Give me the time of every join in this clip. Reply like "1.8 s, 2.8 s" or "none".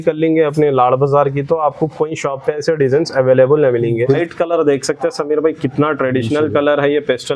4.2 s